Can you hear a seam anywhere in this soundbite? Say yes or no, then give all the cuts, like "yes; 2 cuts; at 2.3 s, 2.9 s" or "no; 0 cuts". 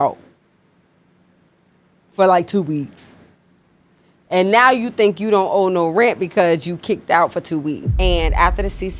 yes; 1 cut; at 7.9 s